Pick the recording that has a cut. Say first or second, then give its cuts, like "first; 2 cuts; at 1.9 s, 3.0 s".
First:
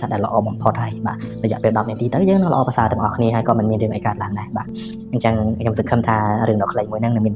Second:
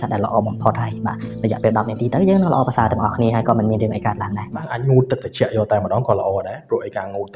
second; 1 cut; at 4.7 s